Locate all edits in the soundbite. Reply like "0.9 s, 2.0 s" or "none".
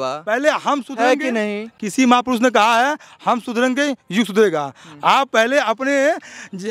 none